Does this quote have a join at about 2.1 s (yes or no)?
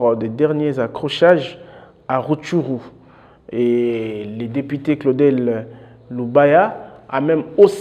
no